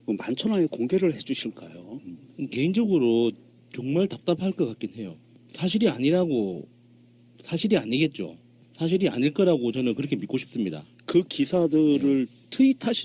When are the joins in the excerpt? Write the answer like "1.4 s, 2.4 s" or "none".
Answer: 8.8 s